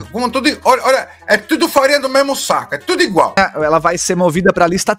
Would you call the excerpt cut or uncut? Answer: cut